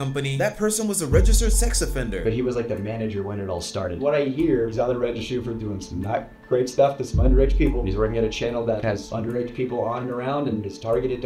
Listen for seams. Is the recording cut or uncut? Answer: uncut